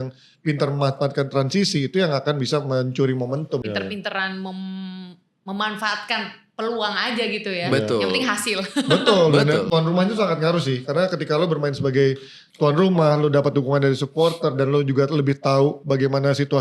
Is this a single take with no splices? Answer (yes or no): no